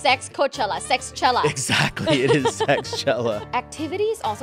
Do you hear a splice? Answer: yes; 1 cut; at 3.4 s

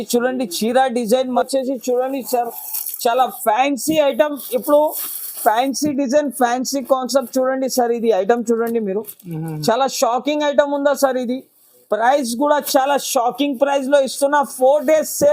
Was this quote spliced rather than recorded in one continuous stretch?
yes; 1 cut; at 1.4 s

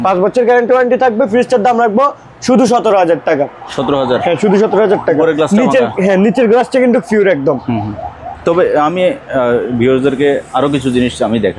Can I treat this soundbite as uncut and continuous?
yes; 0 cuts

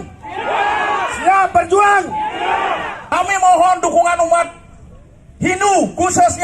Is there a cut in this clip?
yes; 1 cut; at 3.1 s

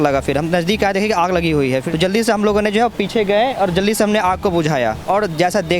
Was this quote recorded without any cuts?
no; 2 cuts; at 1.8 s, 5.0 s

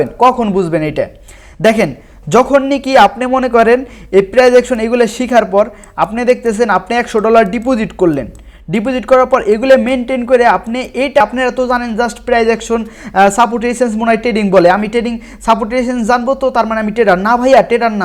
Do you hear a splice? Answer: yes; 1 cut; at 11.2 s

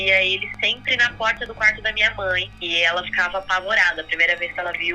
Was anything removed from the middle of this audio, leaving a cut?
yes; 1 cut; at 2.5 s

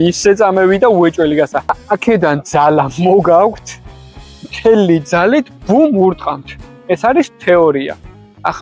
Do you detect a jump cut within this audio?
yes; 1 cut; at 1.8 s

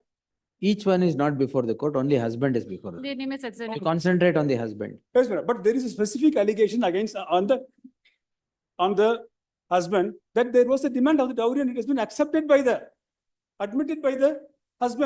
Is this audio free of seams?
yes; 0 cuts

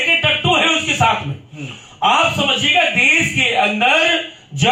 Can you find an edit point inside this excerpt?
no; 0 cuts

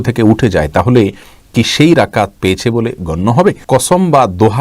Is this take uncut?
no; 1 cut; at 3.6 s

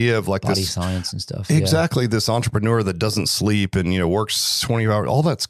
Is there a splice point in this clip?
no; 0 cuts

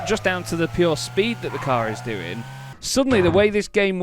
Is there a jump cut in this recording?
yes; 1 cut; at 2.7 s

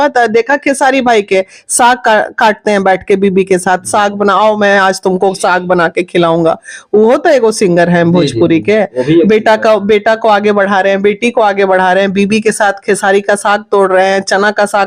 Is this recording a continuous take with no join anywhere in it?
yes; 0 cuts

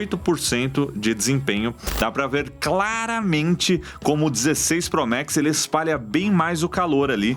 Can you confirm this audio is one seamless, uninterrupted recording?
no; 1 cut; at 1.8 s

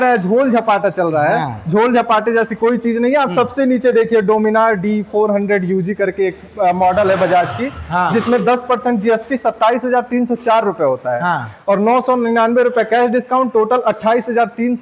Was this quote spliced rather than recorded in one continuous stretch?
no; 0 cuts

